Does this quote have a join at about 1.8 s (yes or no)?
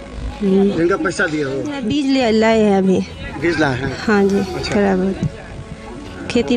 yes